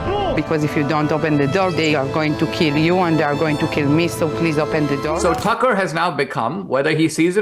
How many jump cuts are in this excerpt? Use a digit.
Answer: 1